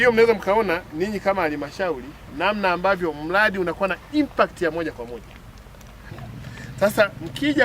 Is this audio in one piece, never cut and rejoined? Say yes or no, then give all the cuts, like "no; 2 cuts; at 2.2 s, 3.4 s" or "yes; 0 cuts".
no; 1 cut; at 6.1 s